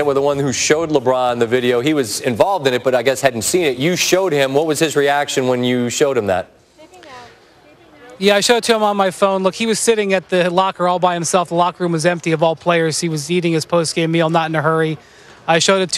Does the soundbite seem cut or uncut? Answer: uncut